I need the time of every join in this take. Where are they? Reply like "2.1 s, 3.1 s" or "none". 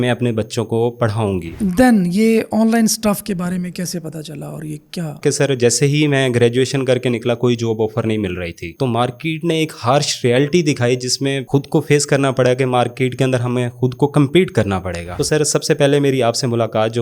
1.5 s, 5.2 s, 8.6 s, 15.0 s